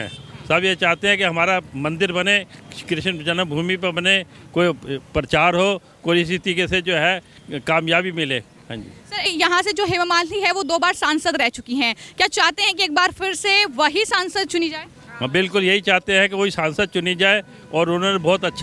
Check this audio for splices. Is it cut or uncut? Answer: cut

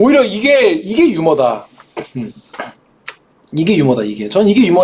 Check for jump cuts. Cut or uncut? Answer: uncut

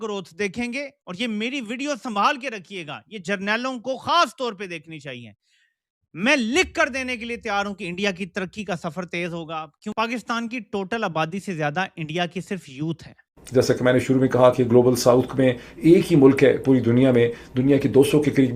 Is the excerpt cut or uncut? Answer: uncut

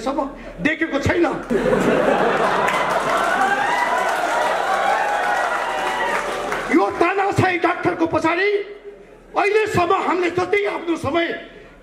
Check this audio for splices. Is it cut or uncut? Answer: cut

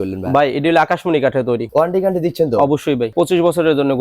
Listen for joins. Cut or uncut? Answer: cut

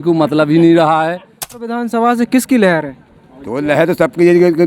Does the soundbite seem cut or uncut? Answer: cut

